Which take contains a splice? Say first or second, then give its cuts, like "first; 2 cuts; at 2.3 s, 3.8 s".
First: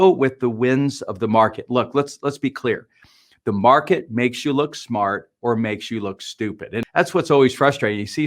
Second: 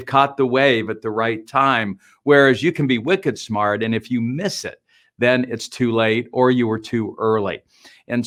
first; 1 cut; at 6.9 s